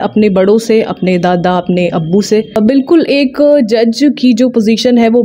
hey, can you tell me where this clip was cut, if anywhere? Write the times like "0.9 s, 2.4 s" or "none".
2.6 s